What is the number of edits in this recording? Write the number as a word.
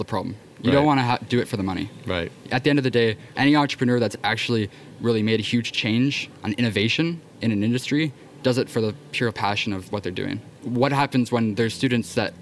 two